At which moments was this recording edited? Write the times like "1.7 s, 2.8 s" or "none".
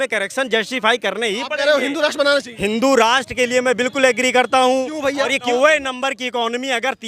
5.5 s